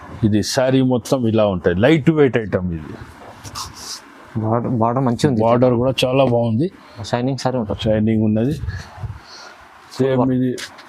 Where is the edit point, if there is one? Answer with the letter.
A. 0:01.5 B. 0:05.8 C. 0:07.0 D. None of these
C